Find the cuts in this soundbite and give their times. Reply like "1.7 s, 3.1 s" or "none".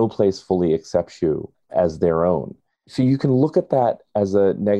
1.5 s, 2.9 s